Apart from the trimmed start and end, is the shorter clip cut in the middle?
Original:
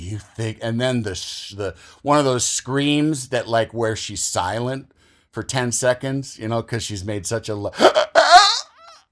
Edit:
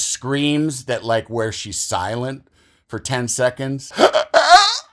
yes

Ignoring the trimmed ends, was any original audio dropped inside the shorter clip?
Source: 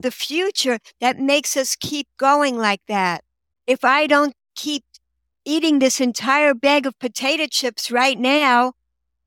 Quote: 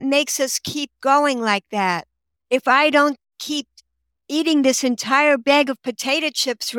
no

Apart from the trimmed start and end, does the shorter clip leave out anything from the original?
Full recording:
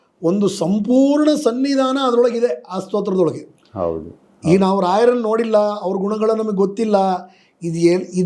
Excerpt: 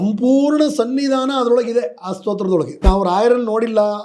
yes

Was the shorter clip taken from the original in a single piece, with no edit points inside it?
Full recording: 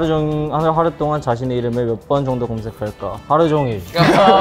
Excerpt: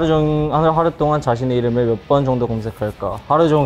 yes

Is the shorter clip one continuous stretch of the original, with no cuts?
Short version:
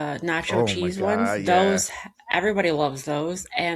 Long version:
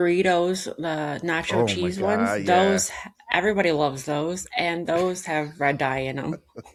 yes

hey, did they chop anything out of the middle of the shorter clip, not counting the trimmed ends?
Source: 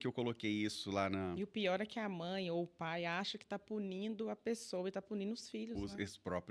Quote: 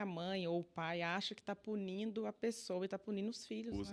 no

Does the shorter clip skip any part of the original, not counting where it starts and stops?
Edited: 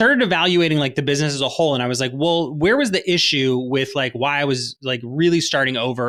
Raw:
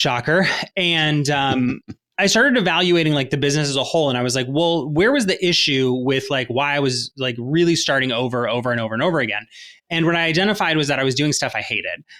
no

